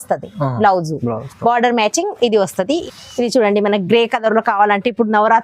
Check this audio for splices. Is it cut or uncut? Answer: cut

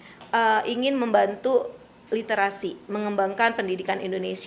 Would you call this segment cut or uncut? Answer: uncut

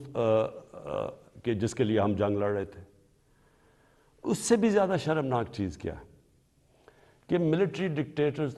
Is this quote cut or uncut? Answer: uncut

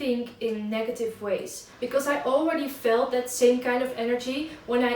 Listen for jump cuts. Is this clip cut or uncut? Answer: cut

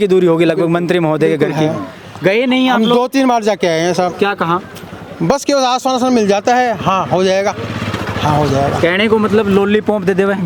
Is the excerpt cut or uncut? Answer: uncut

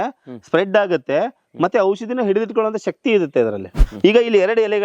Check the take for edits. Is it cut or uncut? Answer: cut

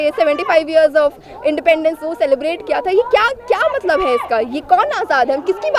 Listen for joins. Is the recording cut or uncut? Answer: uncut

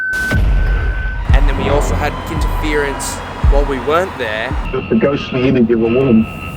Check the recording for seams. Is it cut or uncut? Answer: cut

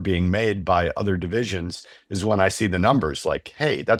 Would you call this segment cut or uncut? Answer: uncut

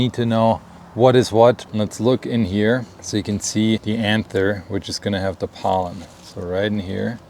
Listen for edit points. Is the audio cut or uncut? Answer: cut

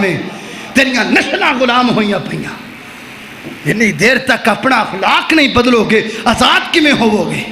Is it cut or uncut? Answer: uncut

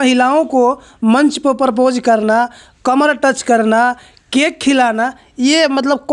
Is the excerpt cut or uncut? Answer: uncut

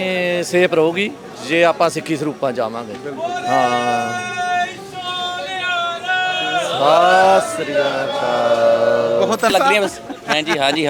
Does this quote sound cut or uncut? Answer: cut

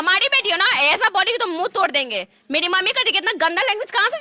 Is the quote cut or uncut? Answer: uncut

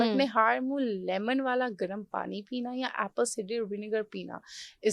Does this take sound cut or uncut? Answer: uncut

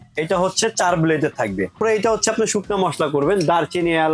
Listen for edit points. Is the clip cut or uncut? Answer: cut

